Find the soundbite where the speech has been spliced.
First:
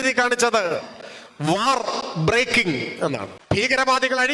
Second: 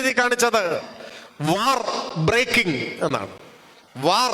first; 1 cut; at 3.3 s

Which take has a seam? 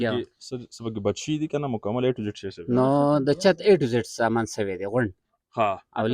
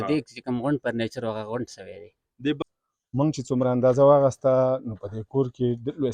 second; 1 cut; at 2.6 s

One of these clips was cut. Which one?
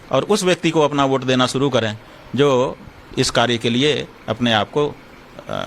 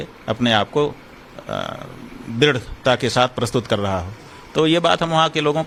first; 1 cut; at 2.7 s

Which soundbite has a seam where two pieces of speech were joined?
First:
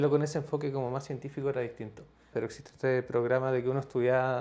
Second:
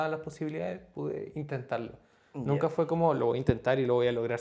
first; 1 cut; at 2.3 s

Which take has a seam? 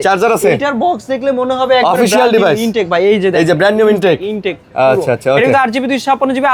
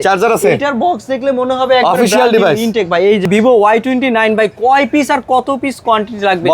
second; 1 cut; at 3.3 s

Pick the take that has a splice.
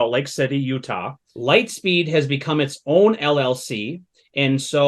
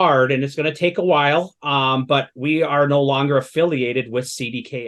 first; 1 cut; at 1.3 s

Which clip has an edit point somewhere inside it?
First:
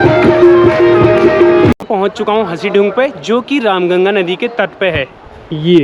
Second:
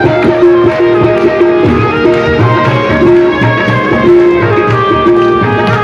first; 1 cut; at 1.8 s

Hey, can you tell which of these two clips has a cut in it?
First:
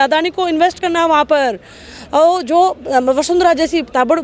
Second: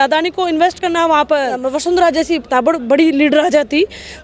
second; 1 cut; at 1.7 s

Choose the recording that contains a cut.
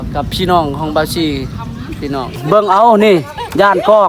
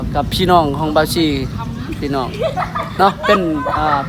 first; 1 cut; at 2.4 s

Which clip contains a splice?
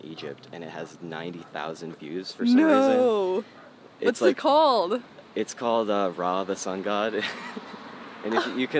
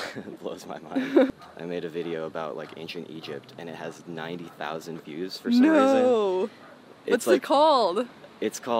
second; 1 cut; at 1.3 s

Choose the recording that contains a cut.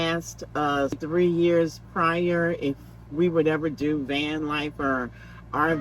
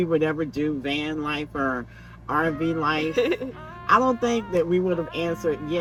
first; 1 cut; at 1.0 s

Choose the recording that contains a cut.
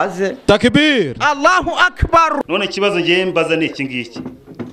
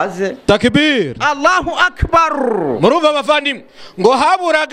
first; 1 cut; at 2.4 s

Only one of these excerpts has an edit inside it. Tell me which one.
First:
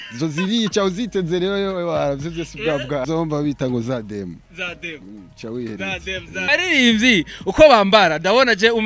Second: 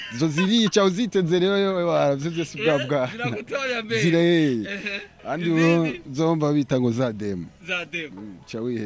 first; 2 cuts; at 3.0 s, 6.5 s

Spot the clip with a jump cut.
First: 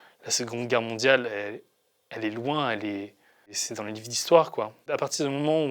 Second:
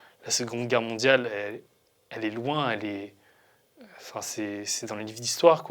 first; 2 cuts; at 3.6 s, 4.8 s

